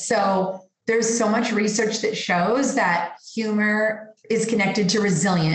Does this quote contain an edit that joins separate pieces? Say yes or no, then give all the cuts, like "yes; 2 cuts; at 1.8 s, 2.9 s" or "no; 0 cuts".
yes; 1 cut; at 4.1 s